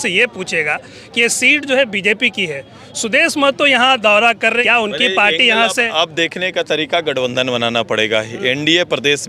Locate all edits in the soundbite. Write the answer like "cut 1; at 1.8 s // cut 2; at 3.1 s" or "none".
cut 1; at 4.6 s